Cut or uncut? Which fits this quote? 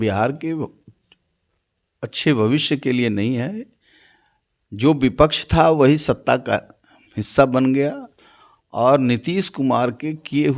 uncut